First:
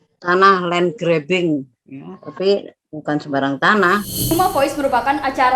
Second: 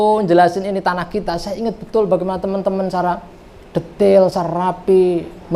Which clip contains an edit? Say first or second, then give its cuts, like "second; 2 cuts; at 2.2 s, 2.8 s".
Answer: first; 1 cut; at 4.3 s